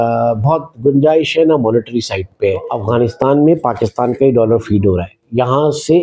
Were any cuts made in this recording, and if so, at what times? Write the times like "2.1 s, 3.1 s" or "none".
2.7 s